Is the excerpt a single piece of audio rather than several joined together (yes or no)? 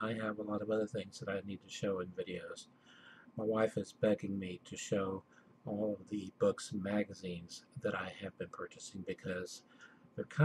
no